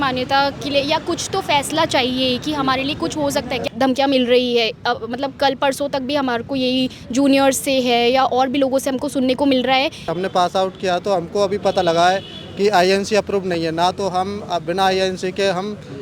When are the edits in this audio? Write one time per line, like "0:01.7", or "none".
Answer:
0:03.7
0:10.1